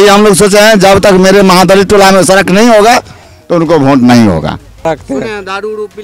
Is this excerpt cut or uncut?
cut